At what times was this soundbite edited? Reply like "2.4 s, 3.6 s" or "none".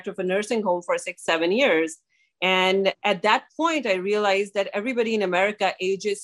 3.0 s